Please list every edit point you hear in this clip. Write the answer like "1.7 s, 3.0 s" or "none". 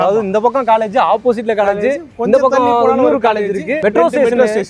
none